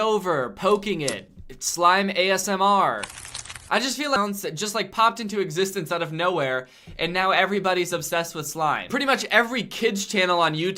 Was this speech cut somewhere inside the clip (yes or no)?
yes